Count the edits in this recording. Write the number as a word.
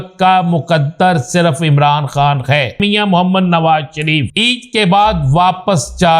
two